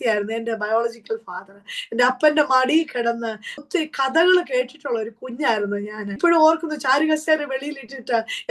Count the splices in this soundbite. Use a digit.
2